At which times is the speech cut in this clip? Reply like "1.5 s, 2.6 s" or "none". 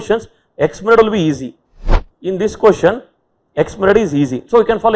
2.0 s